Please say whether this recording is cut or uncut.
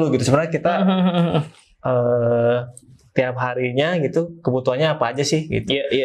uncut